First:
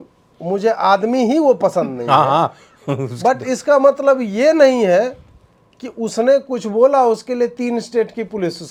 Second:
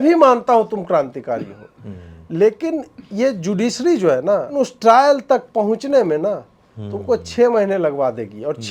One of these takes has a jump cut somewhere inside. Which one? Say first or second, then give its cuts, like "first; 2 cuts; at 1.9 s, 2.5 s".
second; 1 cut; at 4.5 s